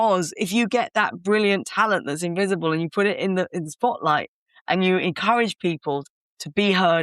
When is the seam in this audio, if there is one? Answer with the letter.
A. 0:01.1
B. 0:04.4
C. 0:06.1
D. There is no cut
C